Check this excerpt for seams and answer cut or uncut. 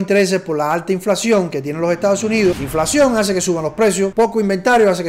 cut